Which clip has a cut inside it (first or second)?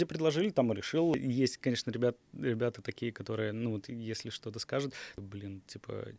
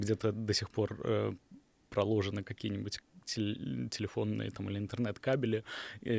first